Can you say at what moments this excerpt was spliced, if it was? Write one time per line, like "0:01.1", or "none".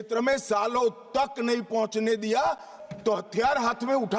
0:02.7